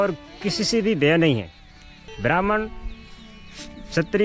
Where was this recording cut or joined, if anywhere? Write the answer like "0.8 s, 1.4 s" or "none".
2.1 s

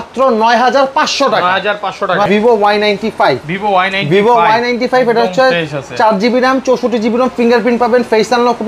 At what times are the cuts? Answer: 2.3 s

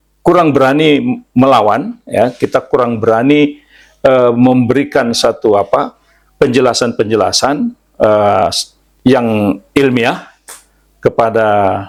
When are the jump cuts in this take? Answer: none

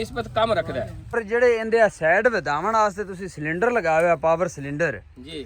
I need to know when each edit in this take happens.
1.1 s

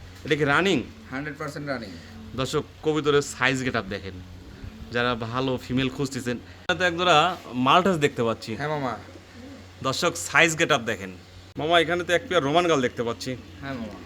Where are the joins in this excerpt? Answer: 6.5 s, 11.5 s

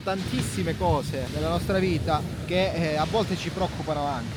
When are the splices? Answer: none

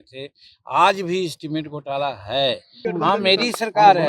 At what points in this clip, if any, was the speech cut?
2.7 s

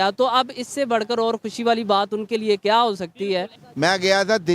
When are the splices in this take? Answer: 3.6 s

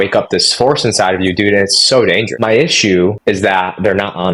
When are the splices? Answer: 2.3 s, 3.2 s

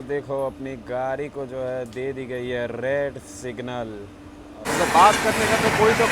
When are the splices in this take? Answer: 4.5 s

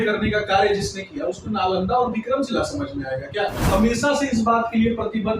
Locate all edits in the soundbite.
3.6 s

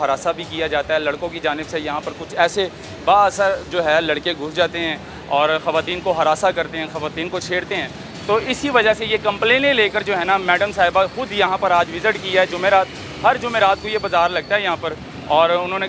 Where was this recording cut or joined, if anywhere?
none

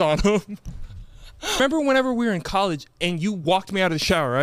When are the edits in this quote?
1.6 s

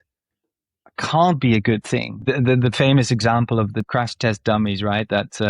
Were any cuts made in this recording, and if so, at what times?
2.3 s, 3.8 s

